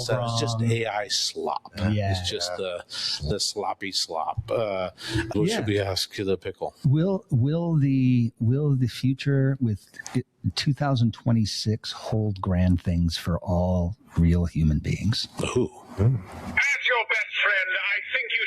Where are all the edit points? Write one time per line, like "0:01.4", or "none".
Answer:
0:05.3